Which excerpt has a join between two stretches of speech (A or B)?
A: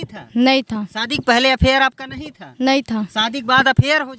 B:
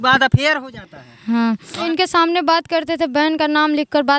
B